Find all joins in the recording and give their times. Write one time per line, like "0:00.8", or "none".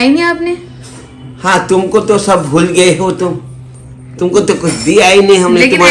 none